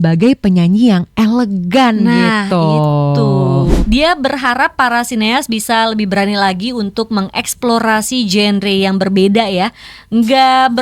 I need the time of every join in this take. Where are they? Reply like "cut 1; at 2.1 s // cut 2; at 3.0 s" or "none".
cut 1; at 3.8 s